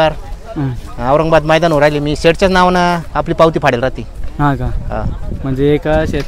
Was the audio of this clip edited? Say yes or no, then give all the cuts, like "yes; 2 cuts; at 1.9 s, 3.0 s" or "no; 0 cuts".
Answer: no; 0 cuts